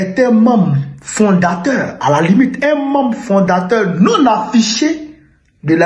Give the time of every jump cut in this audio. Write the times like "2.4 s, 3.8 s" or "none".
none

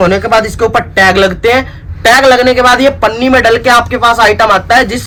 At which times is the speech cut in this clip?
none

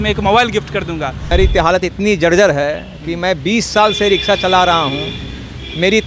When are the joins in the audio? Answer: 1.2 s

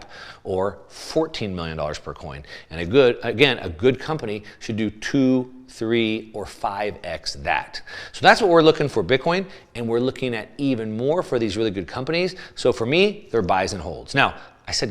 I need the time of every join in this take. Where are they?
none

